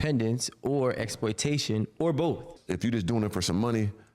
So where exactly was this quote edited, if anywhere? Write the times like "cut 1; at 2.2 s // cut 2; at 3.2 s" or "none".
cut 1; at 2.5 s